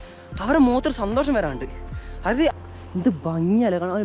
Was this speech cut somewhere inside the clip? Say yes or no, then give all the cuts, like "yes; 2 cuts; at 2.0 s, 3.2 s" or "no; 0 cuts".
yes; 1 cut; at 2.5 s